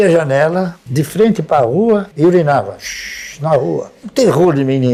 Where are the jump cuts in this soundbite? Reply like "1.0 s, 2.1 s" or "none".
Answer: none